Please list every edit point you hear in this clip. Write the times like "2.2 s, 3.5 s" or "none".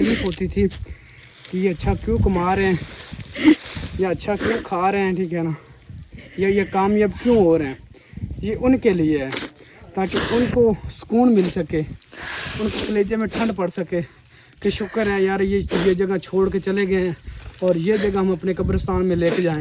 none